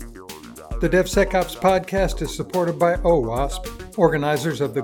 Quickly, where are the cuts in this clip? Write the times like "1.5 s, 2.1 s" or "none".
none